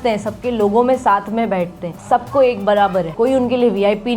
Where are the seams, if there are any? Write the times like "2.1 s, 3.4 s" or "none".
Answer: 1.8 s, 3.1 s